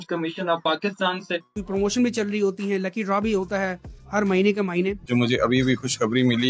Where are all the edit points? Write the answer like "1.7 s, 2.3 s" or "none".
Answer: 1.6 s, 5.0 s